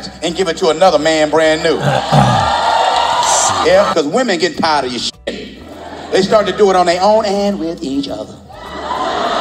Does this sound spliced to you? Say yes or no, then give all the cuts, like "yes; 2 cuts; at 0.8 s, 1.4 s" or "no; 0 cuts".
yes; 1 cut; at 3.9 s